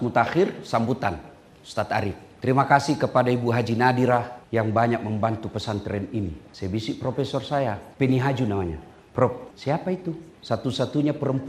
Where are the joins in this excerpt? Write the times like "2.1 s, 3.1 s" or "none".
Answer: 2.3 s, 4.4 s, 6.5 s, 7.9 s, 9.9 s